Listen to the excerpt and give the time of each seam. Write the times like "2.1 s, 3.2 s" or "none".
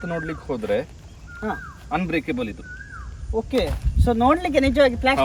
none